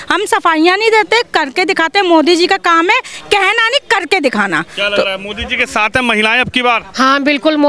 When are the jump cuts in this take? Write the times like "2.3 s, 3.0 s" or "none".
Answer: none